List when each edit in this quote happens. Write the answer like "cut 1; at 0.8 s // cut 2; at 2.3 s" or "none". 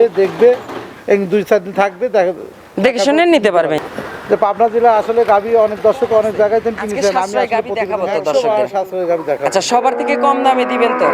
cut 1; at 3.8 s // cut 2; at 7.2 s